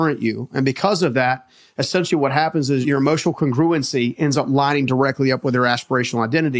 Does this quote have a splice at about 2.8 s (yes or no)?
yes